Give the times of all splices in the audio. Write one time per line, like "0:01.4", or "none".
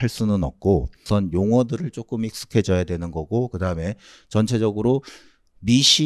0:01.0